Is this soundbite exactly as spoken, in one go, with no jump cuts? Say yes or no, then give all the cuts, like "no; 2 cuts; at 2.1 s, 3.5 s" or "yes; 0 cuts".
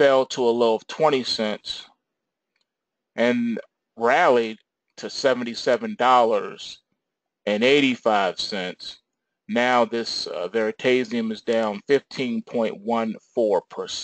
no; 1 cut; at 11.2 s